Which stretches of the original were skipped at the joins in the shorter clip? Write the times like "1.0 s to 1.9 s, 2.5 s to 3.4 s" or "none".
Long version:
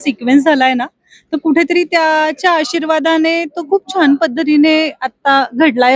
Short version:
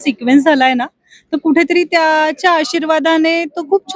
none